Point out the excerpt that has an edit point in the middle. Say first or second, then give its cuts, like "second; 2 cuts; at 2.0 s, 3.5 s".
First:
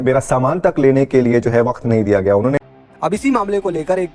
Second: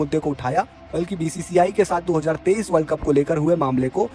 first; 1 cut; at 2.8 s